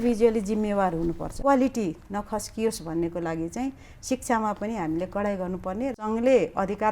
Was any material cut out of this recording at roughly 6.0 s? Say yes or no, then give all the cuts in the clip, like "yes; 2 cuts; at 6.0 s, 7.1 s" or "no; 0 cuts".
yes; 2 cuts; at 1.3 s, 6.0 s